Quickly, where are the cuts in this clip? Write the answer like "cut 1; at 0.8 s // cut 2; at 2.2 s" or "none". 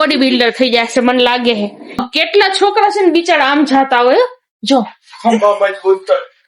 cut 1; at 2.1 s